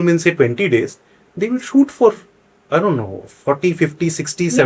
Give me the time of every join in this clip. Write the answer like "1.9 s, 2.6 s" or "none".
none